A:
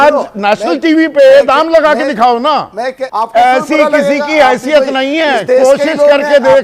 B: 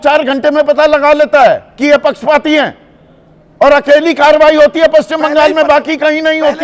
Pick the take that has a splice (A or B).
A